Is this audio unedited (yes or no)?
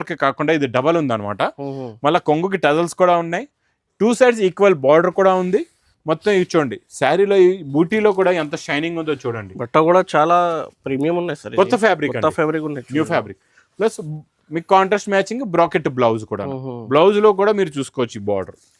yes